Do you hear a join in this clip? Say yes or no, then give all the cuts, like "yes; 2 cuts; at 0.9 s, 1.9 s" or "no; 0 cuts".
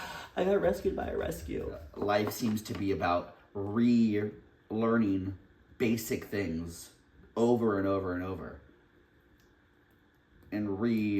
yes; 1 cut; at 1.9 s